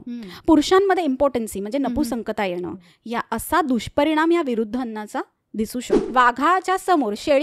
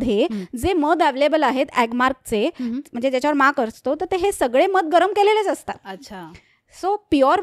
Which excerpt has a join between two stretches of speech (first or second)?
first